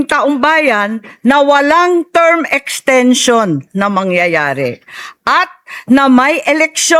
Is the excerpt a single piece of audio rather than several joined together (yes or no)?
yes